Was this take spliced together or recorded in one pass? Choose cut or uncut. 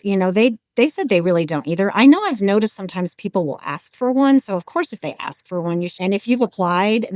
cut